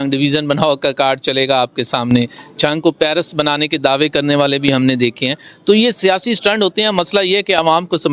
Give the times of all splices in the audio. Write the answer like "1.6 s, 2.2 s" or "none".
none